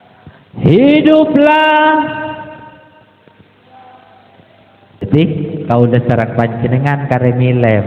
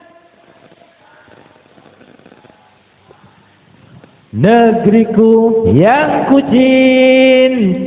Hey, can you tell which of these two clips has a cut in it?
first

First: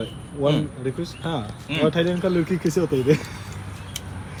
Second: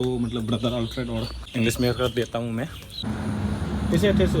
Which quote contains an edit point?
second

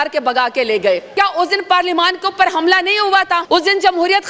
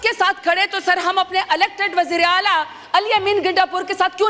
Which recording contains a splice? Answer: first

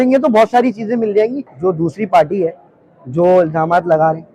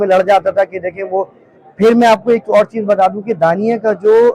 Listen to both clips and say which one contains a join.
first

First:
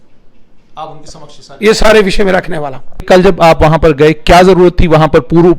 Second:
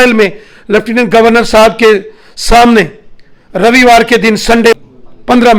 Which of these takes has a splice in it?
first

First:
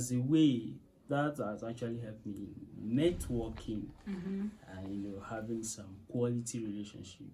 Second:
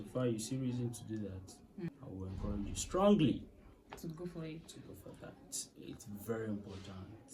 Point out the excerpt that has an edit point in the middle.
second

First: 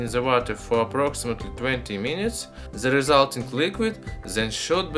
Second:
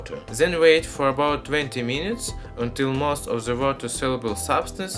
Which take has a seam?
second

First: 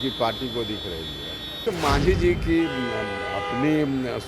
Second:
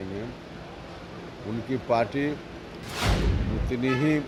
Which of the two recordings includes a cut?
first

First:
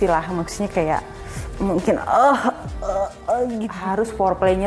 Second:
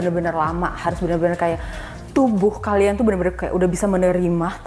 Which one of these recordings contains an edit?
first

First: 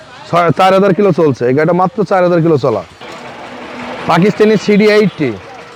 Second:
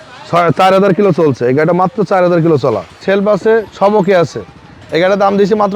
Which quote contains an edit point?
second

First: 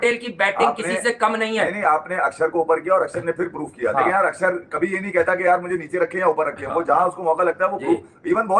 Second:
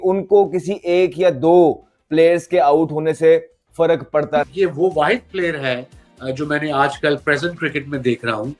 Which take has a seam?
second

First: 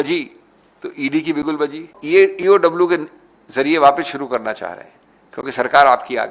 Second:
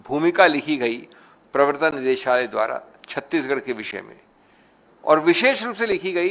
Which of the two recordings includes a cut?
first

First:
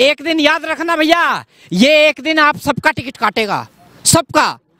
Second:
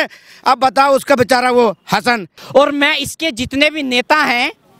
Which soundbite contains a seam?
second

